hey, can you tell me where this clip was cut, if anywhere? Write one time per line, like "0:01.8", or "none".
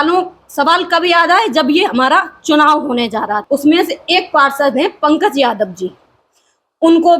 0:03.4